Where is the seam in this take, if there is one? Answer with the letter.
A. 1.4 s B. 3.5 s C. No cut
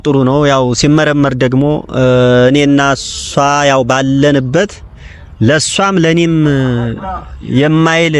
C